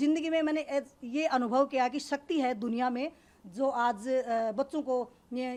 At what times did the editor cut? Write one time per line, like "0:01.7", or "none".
none